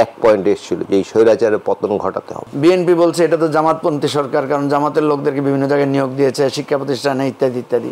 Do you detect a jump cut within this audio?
yes; 1 cut; at 2.4 s

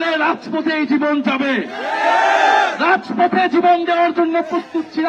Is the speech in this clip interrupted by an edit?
no; 0 cuts

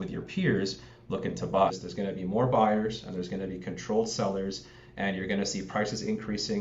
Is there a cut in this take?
yes; 1 cut; at 1.7 s

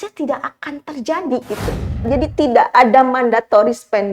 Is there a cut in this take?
yes; 1 cut; at 2.1 s

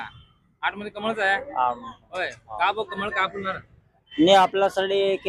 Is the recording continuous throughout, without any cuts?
yes; 0 cuts

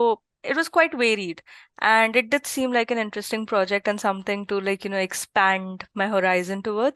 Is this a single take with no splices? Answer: yes; 0 cuts

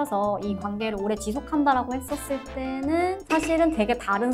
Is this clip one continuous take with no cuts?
yes; 0 cuts

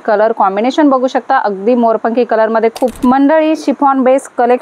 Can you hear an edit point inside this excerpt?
yes; 1 cut; at 3.0 s

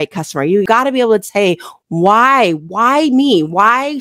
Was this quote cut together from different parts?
no; 0 cuts

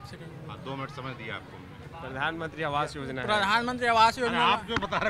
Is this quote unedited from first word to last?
yes; 0 cuts

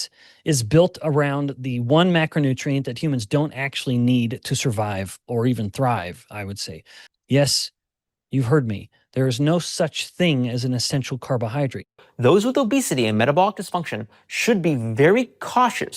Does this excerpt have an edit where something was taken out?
yes; 2 cuts; at 7.1 s, 12.0 s

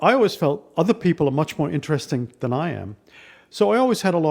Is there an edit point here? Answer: no; 0 cuts

